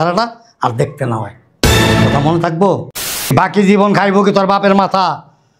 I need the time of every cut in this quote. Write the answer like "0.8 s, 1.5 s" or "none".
3.1 s